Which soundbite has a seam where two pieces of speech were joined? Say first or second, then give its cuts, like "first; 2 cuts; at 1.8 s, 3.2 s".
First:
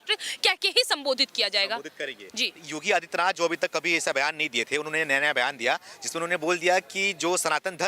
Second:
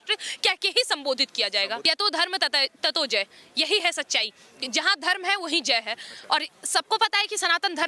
second; 1 cut; at 1.8 s